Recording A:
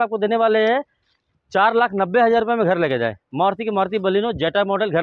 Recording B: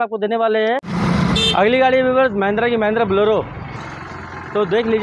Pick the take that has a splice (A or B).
B